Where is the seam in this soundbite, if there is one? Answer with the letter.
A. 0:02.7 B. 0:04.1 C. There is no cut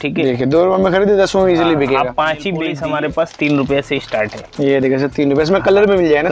A